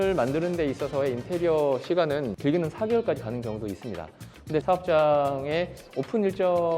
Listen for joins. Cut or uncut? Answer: cut